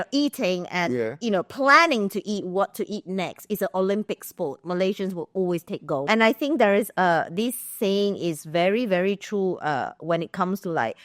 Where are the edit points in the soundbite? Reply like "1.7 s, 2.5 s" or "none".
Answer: 6.0 s